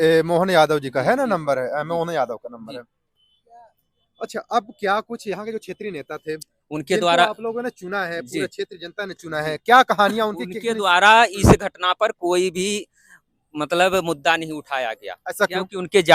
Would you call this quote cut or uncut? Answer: uncut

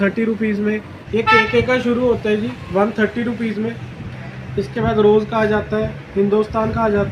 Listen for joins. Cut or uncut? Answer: cut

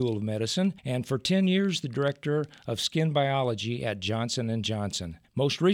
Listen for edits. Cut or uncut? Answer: uncut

